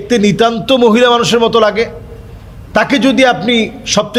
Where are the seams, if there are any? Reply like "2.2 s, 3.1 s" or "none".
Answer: none